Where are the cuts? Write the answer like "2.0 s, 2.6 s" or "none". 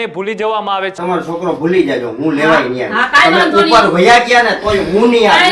1.0 s